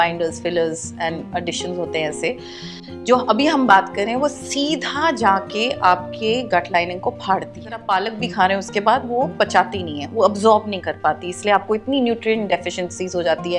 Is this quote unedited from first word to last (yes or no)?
no